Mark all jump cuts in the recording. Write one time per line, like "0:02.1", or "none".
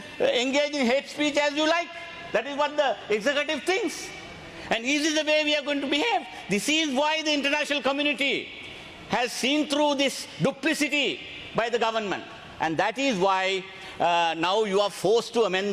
none